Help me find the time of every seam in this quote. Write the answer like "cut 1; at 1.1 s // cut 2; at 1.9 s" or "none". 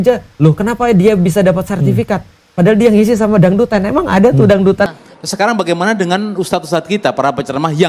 cut 1; at 4.9 s